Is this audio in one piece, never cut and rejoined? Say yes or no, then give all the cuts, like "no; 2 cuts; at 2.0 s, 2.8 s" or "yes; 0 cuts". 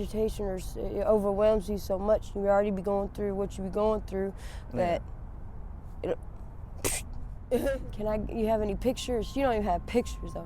no; 1 cut; at 7.6 s